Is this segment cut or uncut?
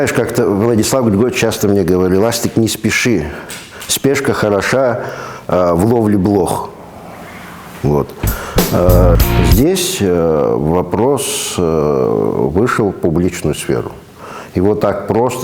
cut